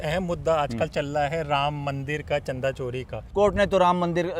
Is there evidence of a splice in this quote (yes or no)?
yes